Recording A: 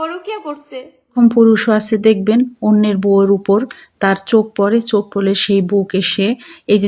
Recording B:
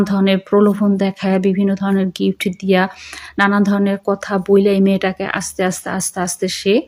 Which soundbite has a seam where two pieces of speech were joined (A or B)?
A